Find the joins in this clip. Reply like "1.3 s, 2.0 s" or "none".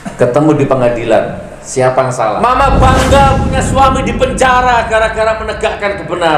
2.4 s